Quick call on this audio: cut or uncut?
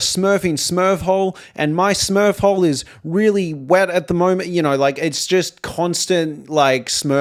uncut